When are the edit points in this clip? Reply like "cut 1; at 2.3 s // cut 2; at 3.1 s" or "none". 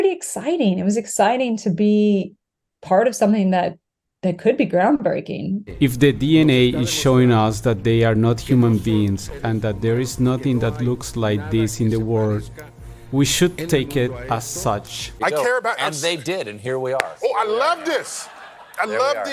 cut 1; at 5.6 s // cut 2; at 15.0 s